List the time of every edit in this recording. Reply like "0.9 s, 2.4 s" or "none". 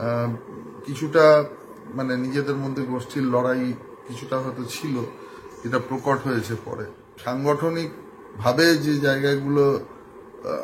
7.1 s